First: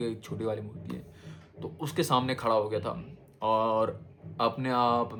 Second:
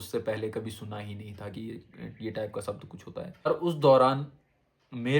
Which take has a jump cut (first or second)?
second